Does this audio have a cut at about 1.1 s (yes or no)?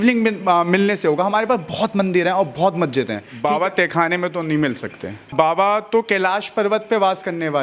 no